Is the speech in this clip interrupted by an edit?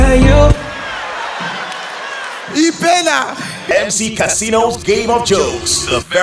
yes; 1 cut; at 3.7 s

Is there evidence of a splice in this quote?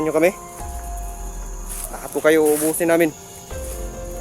yes; 1 cut; at 3.2 s

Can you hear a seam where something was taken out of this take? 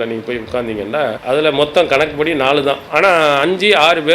yes; 2 cuts; at 1.2 s, 2.8 s

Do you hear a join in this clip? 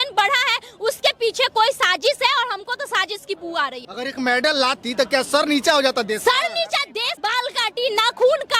yes; 2 cuts; at 3.8 s, 7.1 s

